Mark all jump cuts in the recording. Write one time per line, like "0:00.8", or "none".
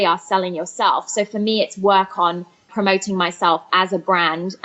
0:02.7